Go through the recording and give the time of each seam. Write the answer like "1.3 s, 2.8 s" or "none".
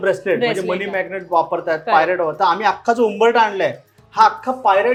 none